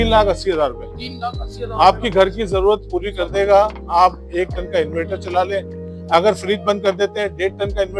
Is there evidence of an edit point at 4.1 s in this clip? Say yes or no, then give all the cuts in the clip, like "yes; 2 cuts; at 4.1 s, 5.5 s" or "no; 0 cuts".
no; 0 cuts